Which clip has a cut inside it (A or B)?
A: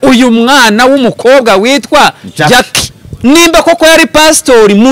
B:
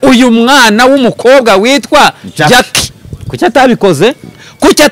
A